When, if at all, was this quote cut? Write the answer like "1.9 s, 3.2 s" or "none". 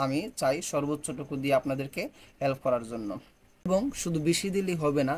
3.7 s

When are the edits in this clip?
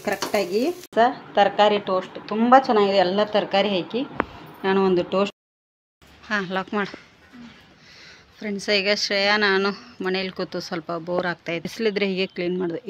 0.9 s, 5.3 s, 11.7 s

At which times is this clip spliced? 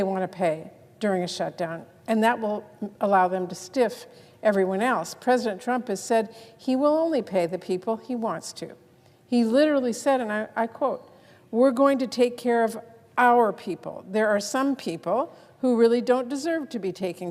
none

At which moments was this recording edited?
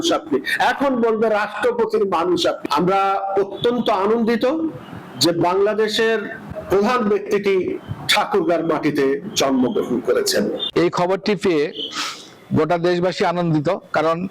10.6 s

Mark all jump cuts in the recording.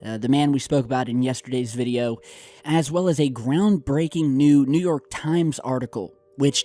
2.2 s

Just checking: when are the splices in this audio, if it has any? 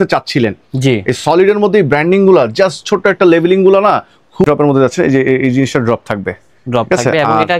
4.5 s

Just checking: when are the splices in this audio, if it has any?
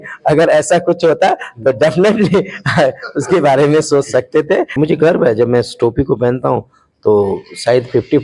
4.8 s

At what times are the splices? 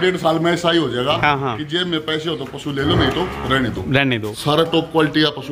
4.3 s

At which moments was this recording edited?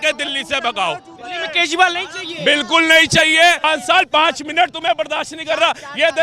3.6 s

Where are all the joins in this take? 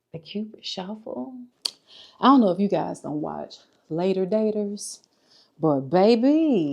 1.6 s

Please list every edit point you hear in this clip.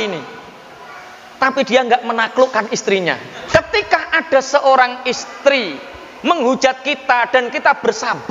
3.3 s

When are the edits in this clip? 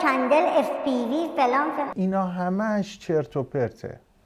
none

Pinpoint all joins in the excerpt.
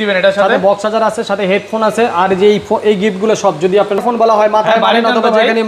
4.0 s

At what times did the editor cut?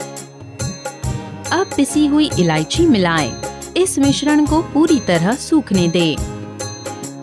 0.9 s, 6.3 s

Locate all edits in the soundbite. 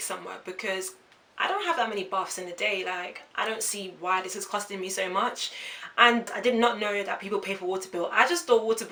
none

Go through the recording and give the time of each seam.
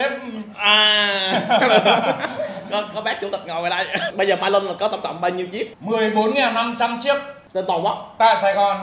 4.1 s, 5.7 s, 7.4 s

